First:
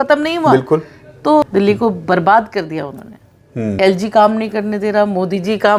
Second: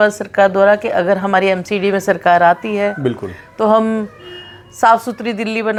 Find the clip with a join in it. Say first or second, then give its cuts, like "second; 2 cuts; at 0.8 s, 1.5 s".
first; 2 cuts; at 1.5 s, 3.8 s